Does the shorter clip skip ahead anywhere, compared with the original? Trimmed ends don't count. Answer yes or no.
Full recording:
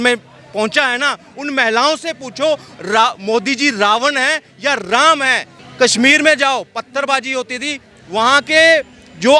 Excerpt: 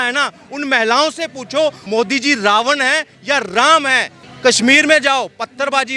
yes